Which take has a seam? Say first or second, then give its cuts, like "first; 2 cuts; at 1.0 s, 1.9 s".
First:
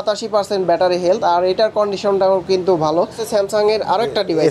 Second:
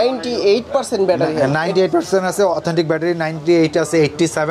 first; 1 cut; at 3.2 s